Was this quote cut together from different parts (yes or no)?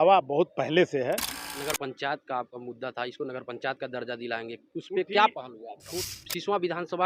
yes